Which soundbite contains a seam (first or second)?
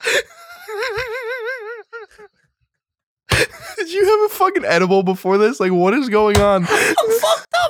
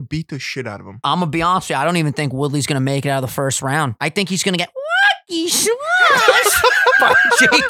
second